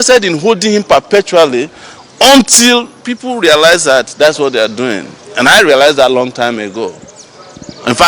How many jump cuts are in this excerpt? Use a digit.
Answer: 0